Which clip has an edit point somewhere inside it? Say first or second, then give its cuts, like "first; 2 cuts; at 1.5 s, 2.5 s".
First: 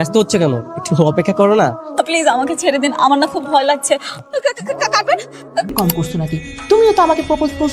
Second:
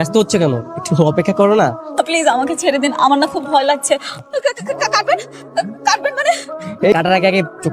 first; 1 cut; at 5.7 s